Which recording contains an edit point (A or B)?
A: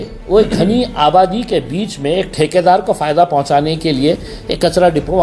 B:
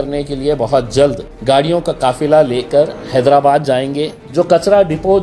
B